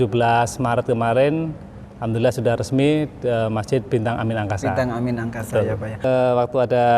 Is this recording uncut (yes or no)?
no